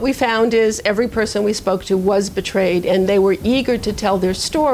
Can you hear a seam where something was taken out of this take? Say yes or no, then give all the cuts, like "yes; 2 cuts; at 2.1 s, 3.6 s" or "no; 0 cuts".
no; 0 cuts